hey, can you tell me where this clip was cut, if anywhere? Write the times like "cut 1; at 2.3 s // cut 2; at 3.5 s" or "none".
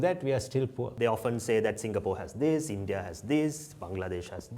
cut 1; at 0.9 s